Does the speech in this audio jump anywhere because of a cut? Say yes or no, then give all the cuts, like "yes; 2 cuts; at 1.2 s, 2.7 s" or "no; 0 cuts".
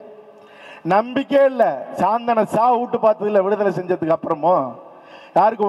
no; 0 cuts